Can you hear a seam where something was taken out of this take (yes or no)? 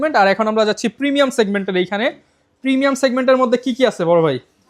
no